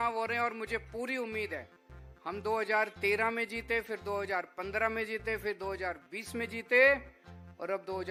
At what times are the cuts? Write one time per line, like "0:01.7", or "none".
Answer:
none